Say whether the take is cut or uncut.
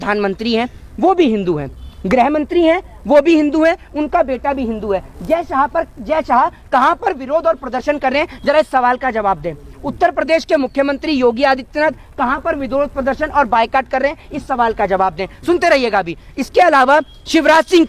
uncut